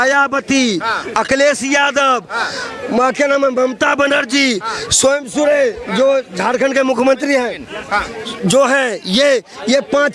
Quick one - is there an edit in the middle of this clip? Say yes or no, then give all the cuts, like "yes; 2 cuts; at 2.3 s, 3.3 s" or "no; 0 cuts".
no; 0 cuts